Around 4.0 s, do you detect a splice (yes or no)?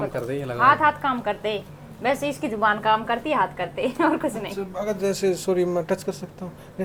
no